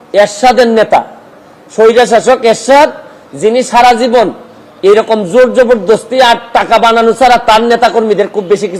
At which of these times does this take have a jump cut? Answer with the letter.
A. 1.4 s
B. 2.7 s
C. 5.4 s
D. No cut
D